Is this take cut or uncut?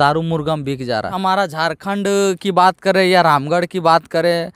cut